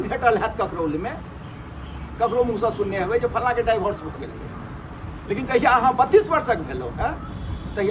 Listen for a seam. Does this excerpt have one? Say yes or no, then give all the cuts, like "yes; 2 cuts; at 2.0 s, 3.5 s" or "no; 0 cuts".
no; 0 cuts